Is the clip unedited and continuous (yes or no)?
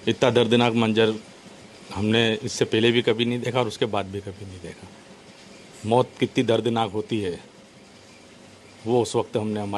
yes